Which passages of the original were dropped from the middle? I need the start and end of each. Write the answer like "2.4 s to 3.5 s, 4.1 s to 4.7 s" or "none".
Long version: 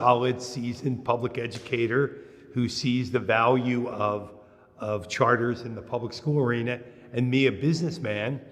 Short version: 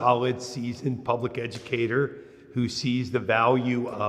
none